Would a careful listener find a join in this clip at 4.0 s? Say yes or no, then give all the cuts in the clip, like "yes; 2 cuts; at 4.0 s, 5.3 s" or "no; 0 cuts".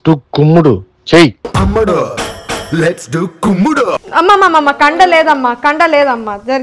no; 0 cuts